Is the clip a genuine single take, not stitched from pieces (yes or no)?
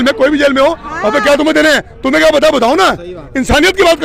yes